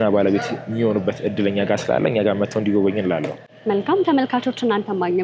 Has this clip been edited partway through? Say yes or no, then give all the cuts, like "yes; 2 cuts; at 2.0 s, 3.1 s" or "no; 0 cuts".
no; 0 cuts